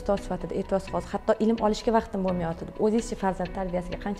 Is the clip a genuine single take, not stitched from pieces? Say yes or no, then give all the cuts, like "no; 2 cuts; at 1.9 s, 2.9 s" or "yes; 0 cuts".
yes; 0 cuts